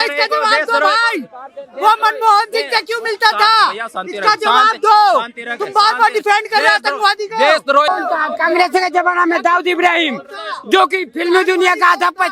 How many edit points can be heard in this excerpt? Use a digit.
1